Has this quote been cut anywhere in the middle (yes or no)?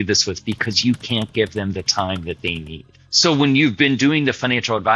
yes